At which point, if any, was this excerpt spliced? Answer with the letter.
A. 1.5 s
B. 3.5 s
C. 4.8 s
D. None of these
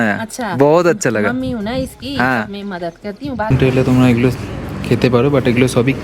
B